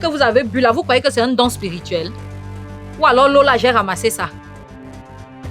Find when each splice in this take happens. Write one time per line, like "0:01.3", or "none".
0:04.3